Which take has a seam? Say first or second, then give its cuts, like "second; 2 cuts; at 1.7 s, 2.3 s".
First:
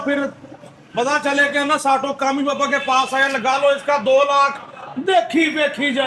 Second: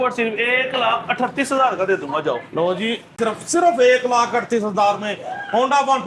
second; 1 cut; at 3.2 s